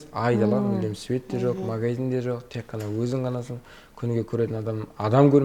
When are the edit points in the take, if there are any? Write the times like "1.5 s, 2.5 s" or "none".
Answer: none

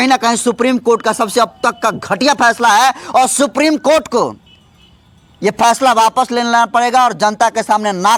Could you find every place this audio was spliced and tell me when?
none

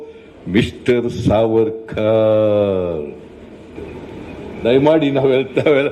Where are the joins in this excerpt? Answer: 3.8 s

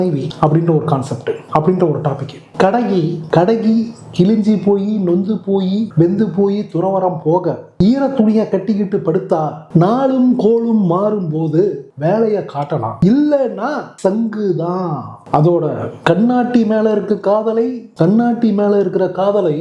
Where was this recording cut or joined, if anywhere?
none

